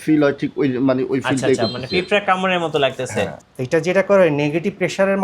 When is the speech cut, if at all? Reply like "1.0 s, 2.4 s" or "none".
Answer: 3.5 s